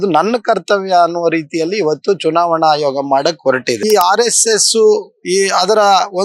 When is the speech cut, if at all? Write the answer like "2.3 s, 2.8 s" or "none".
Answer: 3.8 s